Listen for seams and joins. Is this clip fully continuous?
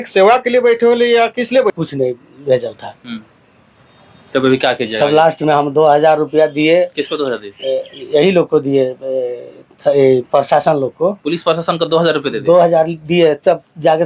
no; 1 cut; at 1.8 s

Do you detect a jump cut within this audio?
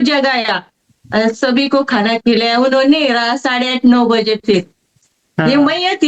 yes; 1 cut; at 5.1 s

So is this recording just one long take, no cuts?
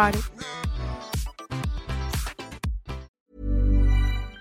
no; 1 cut; at 3.2 s

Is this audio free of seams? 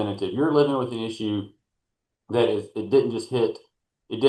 yes; 0 cuts

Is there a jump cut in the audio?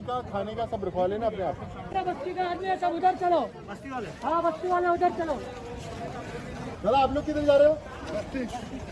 no; 0 cuts

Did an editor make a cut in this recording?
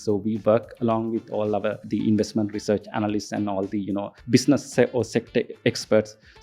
yes; 2 cuts; at 1.8 s, 4.2 s

